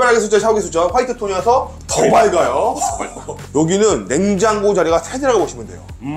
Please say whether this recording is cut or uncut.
cut